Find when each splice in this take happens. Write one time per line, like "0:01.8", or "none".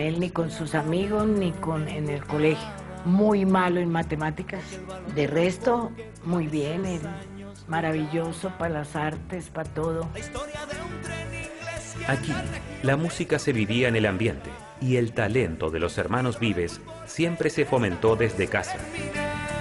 none